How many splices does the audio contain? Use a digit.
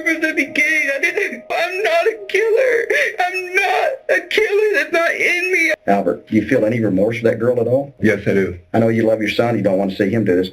2